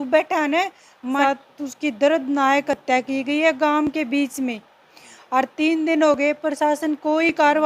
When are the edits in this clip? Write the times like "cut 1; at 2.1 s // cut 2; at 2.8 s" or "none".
cut 1; at 1.2 s